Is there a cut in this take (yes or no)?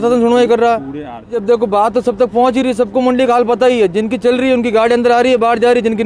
yes